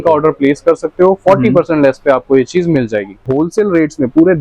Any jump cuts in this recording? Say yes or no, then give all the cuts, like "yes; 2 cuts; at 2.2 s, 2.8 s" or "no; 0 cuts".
yes; 1 cut; at 3.3 s